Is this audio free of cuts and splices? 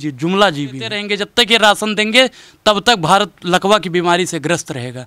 no; 1 cut; at 1.0 s

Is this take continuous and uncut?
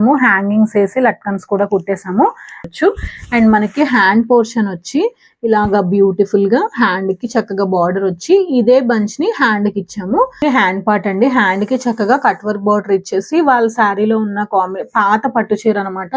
no; 2 cuts; at 2.7 s, 10.3 s

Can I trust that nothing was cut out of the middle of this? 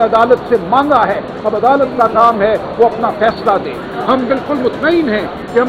yes; 0 cuts

